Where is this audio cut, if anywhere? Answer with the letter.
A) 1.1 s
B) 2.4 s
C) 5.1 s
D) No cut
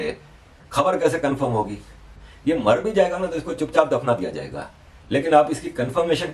D